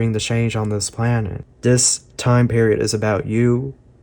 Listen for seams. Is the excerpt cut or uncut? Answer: cut